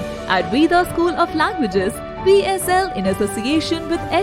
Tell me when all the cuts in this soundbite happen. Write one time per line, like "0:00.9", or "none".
none